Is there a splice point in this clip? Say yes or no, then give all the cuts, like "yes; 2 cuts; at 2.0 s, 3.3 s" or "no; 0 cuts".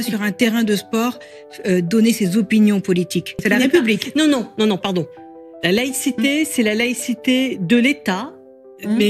yes; 1 cut; at 3.4 s